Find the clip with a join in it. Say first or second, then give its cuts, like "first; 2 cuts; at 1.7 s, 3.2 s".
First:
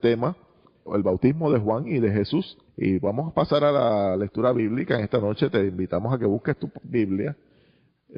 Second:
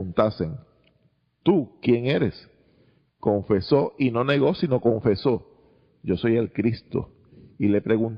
first; 1 cut; at 3.7 s